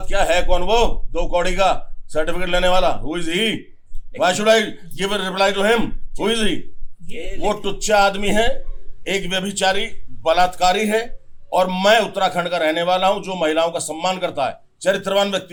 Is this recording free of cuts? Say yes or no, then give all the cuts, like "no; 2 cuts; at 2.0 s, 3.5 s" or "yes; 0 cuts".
yes; 0 cuts